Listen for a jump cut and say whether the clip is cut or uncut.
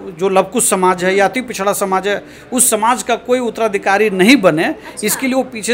uncut